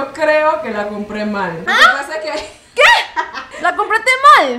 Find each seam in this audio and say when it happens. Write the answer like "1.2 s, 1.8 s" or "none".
1.6 s, 3.4 s